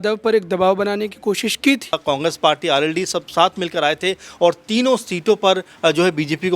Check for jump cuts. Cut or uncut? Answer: cut